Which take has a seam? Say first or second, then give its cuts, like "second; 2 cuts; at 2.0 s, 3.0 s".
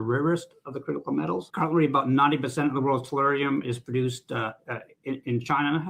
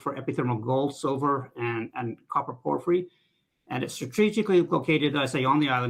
first; 1 cut; at 1.5 s